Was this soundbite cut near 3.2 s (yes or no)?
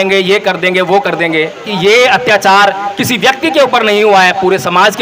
no